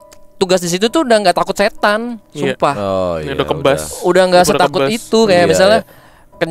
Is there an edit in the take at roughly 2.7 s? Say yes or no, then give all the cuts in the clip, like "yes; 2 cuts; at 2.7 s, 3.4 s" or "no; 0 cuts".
no; 0 cuts